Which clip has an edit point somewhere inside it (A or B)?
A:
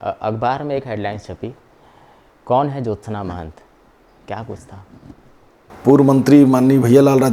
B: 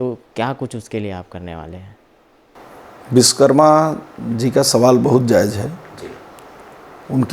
A